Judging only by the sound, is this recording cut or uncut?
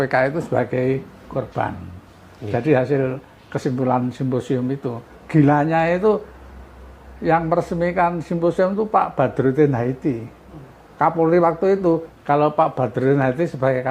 cut